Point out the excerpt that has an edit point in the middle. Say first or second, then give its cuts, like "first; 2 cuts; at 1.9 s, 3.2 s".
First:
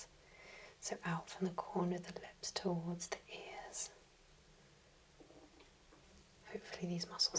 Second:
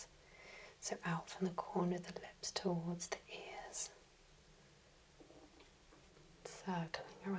second; 1 cut; at 6.1 s